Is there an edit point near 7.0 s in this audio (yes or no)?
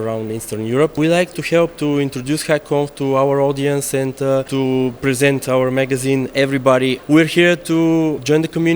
yes